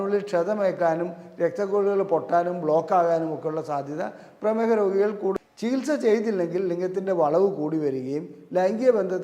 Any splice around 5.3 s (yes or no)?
yes